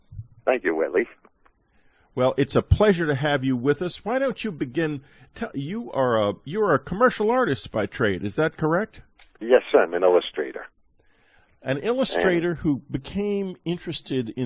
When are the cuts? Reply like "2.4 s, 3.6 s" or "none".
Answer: none